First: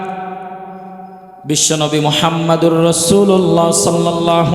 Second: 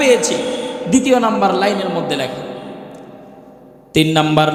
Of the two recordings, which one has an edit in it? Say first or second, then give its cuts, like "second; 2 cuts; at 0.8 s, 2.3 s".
first; 1 cut; at 1.3 s